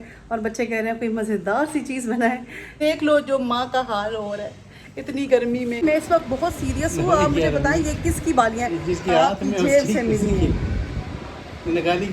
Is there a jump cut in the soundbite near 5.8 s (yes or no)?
yes